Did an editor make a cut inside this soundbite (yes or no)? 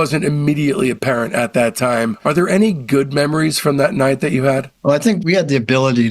yes